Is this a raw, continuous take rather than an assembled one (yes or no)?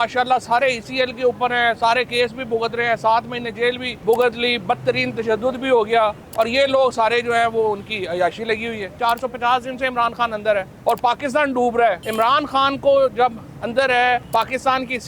no